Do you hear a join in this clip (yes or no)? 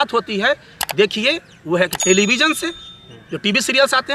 no